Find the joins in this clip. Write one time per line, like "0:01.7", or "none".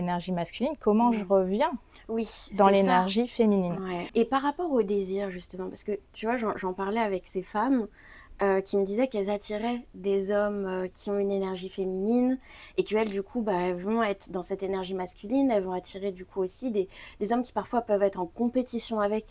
0:04.1